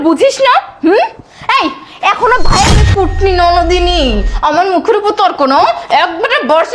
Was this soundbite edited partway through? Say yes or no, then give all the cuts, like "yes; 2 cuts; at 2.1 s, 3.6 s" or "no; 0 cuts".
yes; 1 cut; at 2.8 s